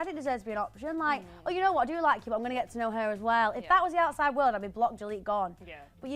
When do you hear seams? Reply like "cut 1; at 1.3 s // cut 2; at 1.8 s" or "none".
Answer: none